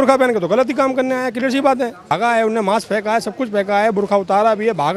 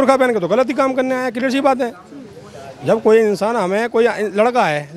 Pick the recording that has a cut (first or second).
first